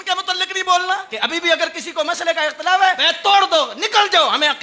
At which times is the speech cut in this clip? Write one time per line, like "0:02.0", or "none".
0:01.1
0:03.1